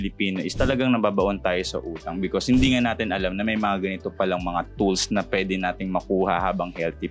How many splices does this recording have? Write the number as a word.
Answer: zero